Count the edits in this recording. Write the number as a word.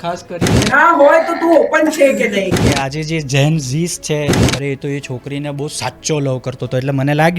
two